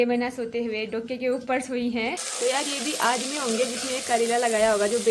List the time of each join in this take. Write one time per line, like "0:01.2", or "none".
0:02.2

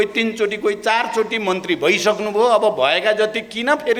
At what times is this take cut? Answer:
none

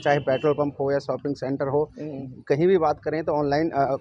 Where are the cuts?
none

